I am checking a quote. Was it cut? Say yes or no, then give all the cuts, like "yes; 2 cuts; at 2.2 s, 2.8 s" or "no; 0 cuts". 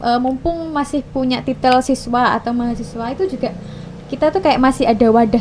no; 0 cuts